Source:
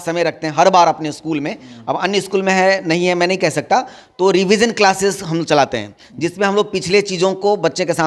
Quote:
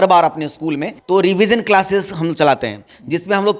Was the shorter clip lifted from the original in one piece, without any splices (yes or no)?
no